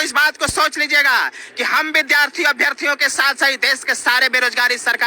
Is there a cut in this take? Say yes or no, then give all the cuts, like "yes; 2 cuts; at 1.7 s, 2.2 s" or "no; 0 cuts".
no; 0 cuts